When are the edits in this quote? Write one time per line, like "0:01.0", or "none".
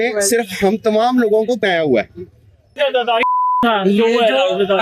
0:01.6
0:02.8